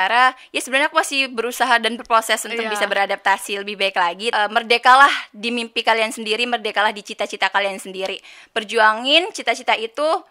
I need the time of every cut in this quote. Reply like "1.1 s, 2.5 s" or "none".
4.3 s